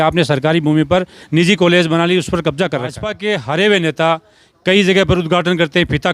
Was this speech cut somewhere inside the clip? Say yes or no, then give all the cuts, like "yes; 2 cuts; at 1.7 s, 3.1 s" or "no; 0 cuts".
yes; 1 cut; at 3.1 s